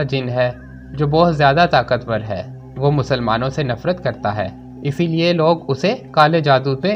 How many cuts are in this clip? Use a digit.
0